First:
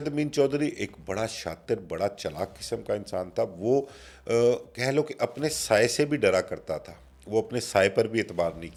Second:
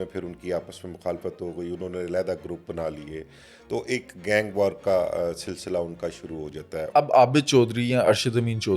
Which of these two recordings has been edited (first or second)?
second